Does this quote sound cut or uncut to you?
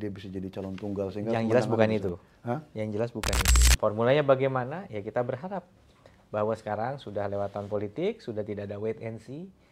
cut